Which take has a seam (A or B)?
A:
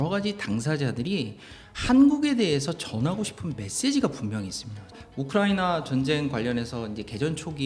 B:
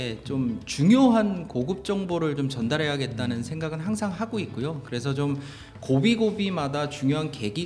A